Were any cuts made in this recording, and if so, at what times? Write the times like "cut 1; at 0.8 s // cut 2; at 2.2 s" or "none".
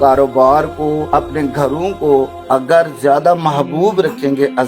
cut 1; at 1.1 s // cut 2; at 2.4 s